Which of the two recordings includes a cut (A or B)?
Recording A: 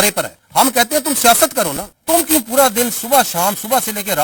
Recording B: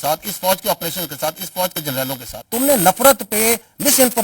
B